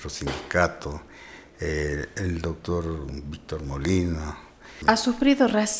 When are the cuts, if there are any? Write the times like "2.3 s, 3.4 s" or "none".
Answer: 4.6 s